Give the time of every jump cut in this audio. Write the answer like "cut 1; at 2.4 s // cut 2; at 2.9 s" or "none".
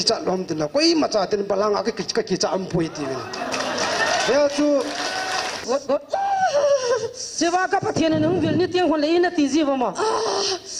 cut 1; at 5.6 s